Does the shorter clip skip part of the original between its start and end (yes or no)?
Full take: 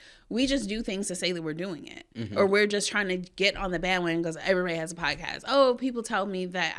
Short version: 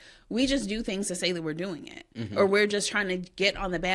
no